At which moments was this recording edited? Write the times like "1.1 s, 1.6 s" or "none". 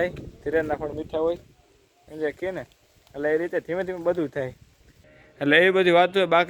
5.0 s

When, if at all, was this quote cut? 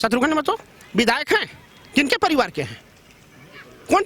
none

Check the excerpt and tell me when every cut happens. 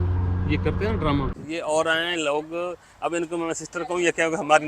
1.3 s

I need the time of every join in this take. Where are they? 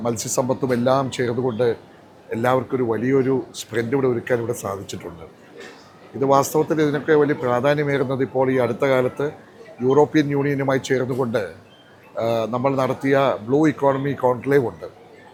none

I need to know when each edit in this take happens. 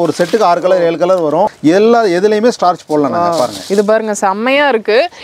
1.5 s

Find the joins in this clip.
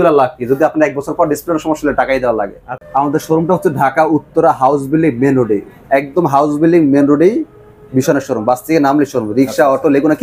2.8 s

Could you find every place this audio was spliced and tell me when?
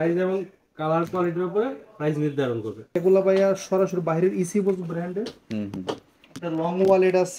2.9 s

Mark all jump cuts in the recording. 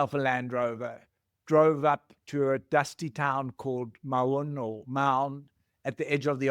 none

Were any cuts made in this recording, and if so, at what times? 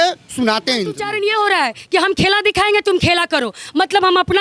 1.1 s

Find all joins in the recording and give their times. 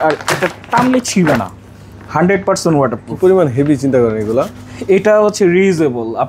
none

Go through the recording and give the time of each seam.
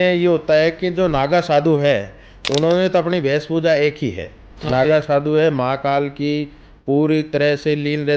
none

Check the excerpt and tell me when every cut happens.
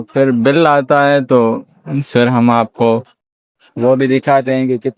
none

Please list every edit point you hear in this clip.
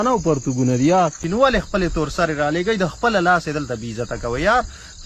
1.2 s

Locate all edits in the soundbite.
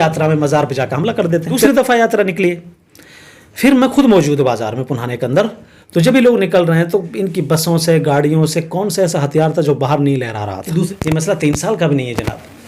1.7 s, 10.9 s

